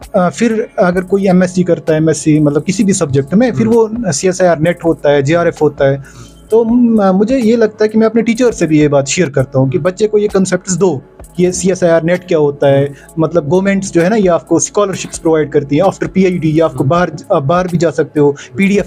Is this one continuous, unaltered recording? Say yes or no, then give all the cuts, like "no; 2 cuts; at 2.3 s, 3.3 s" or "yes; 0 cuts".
yes; 0 cuts